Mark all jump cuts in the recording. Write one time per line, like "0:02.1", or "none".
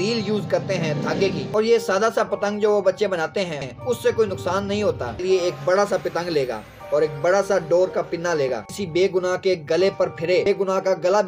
0:01.4
0:03.6
0:05.2
0:08.7
0:10.5